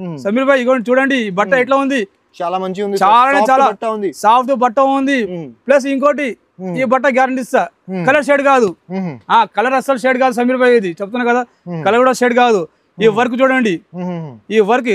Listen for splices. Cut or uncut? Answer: uncut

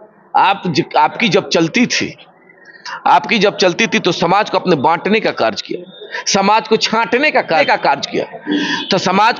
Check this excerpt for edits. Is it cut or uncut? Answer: cut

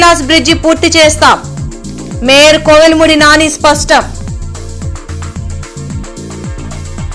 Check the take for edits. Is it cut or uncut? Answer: uncut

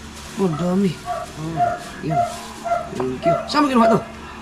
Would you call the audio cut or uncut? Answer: uncut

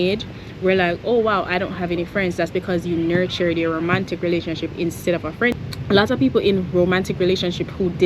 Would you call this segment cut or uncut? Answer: cut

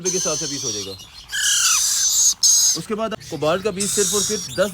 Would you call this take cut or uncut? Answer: cut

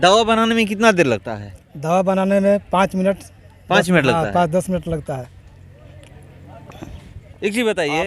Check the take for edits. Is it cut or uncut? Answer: uncut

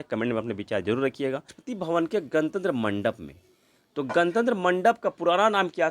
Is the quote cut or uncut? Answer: cut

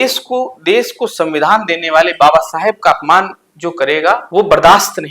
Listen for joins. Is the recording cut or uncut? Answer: uncut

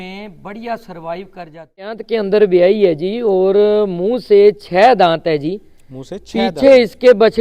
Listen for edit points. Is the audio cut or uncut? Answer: cut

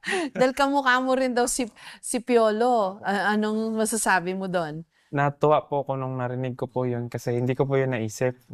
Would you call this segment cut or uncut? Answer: uncut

